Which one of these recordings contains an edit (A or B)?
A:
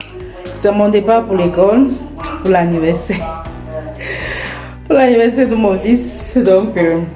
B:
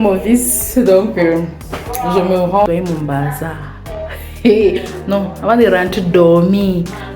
B